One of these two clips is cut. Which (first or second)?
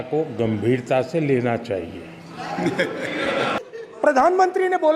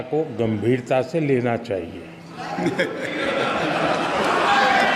first